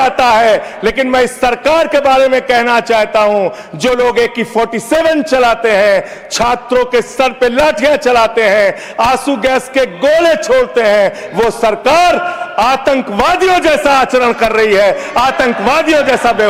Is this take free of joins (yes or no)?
yes